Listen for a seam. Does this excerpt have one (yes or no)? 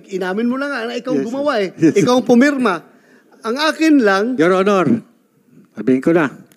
yes